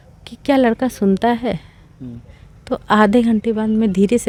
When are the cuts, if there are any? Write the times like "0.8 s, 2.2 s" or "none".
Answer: none